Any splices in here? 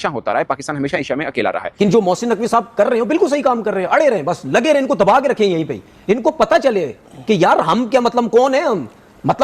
yes; 1 cut; at 1.7 s

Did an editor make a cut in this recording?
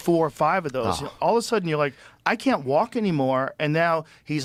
no; 0 cuts

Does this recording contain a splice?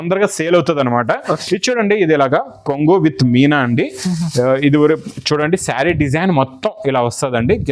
no; 0 cuts

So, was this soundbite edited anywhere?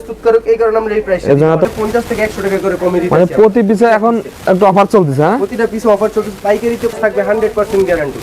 yes; 2 cuts; at 1.7 s, 6.9 s

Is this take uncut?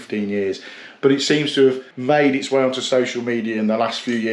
no; 1 cut; at 1.9 s

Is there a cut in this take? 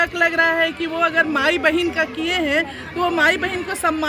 no; 0 cuts

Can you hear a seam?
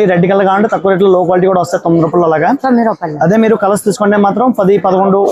no; 0 cuts

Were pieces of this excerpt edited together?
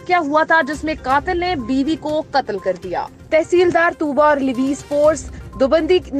yes; 1 cut; at 3.1 s

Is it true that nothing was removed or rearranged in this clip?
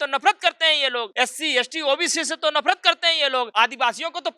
no; 2 cuts; at 1.1 s, 3.5 s

